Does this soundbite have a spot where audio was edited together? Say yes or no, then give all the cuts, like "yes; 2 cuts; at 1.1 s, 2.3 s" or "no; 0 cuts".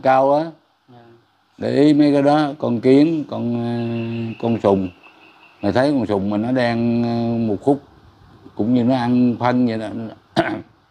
no; 0 cuts